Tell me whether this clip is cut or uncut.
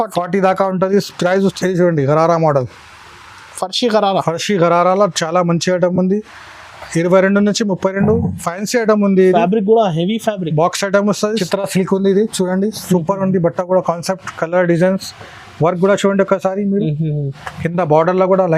cut